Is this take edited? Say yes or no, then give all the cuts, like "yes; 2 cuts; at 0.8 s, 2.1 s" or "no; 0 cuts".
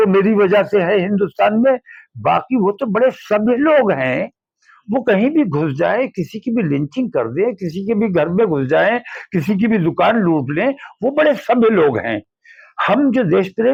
no; 0 cuts